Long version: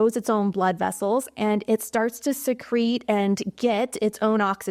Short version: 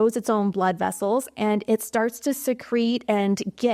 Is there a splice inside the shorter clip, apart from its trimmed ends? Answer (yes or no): no